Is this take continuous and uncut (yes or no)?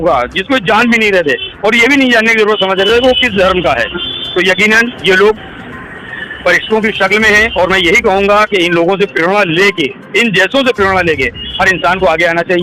yes